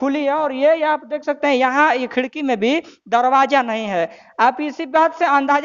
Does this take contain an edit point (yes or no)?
no